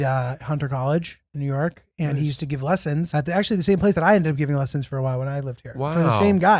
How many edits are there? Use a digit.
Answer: 1